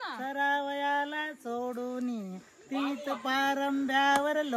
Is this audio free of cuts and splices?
yes; 0 cuts

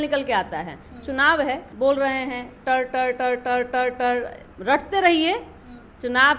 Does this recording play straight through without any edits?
no; 2 cuts; at 1.7 s, 4.4 s

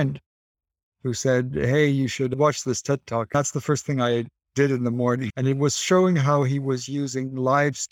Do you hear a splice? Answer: yes; 2 cuts; at 3.3 s, 5.3 s

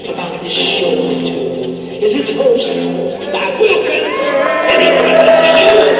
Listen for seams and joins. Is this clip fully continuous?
yes; 0 cuts

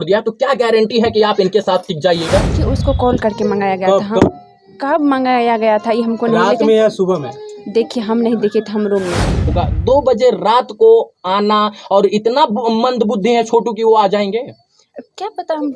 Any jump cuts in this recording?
yes; 2 cuts; at 2.5 s, 9.6 s

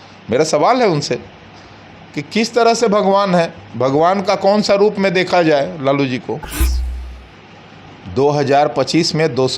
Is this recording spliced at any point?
yes; 1 cut; at 6.9 s

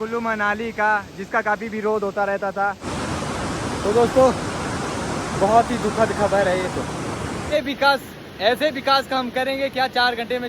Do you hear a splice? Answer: yes; 2 cuts; at 2.8 s, 7.5 s

